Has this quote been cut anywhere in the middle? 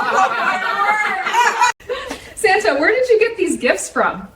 yes; 1 cut; at 1.8 s

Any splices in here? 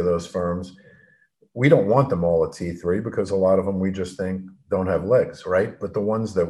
no; 0 cuts

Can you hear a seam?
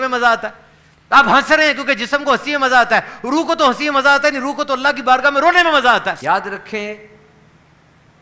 yes; 1 cut; at 6.2 s

